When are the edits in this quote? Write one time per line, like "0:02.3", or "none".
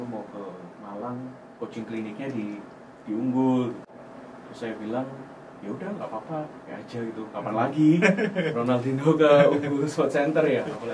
none